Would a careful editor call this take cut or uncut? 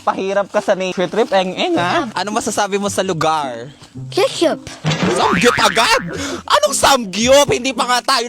cut